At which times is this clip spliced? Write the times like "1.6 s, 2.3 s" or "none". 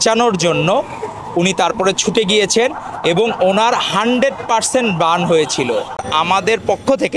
6.0 s